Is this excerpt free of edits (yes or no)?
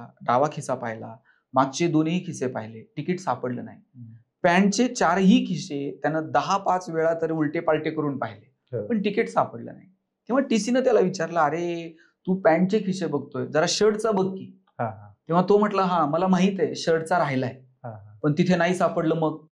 yes